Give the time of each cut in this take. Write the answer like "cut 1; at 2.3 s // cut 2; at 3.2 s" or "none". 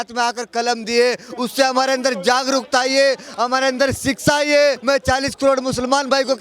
cut 1; at 4.8 s